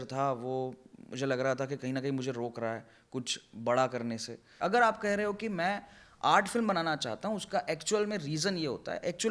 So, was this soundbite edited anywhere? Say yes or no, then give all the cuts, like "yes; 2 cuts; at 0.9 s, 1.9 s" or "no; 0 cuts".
yes; 1 cut; at 4.4 s